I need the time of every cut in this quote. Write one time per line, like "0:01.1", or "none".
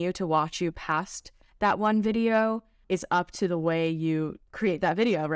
0:02.8
0:04.4